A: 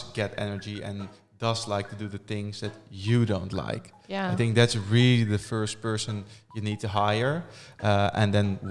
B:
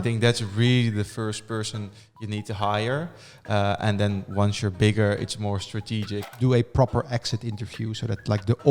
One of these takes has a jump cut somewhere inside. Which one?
B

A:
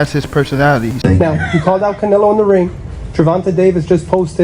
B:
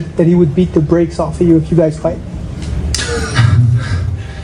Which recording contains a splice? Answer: A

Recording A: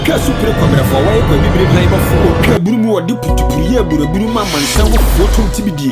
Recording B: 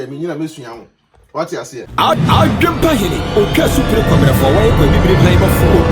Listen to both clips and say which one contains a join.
B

